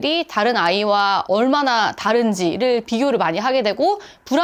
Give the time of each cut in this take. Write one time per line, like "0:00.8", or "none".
0:01.2